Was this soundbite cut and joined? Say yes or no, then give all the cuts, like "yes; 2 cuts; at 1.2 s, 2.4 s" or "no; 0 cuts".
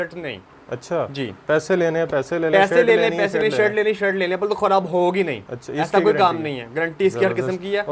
no; 0 cuts